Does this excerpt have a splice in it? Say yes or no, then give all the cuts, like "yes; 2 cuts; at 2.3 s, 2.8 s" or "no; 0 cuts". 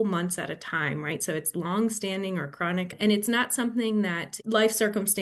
yes; 2 cuts; at 2.9 s, 4.3 s